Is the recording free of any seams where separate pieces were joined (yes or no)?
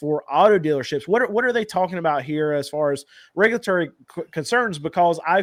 yes